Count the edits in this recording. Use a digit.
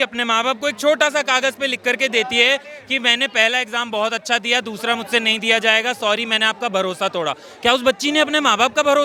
0